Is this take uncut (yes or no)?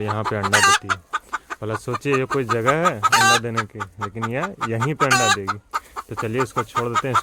yes